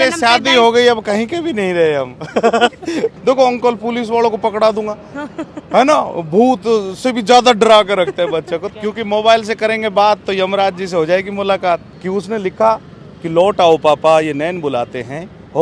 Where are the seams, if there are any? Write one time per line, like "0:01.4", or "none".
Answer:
0:03.1
0:08.6
0:11.9